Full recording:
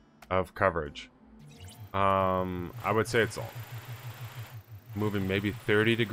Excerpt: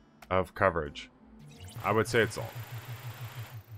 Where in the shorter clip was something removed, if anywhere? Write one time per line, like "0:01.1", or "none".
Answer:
0:01.7